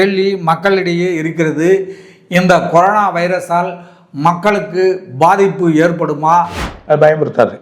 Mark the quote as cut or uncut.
cut